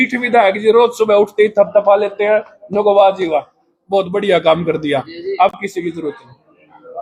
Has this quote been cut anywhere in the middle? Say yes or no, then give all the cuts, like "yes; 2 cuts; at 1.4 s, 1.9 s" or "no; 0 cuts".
no; 0 cuts